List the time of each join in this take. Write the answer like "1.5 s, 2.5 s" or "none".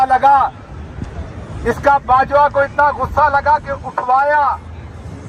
none

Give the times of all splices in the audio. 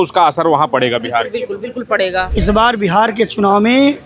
2.3 s

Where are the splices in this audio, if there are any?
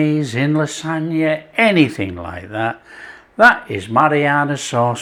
none

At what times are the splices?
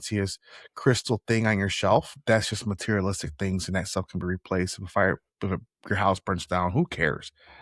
2.2 s

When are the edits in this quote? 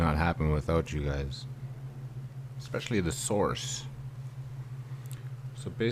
none

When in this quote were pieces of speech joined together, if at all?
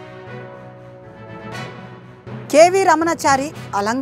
1.3 s, 2.4 s

